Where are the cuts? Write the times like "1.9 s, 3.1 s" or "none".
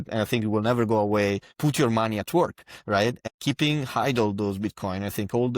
1.5 s, 3.2 s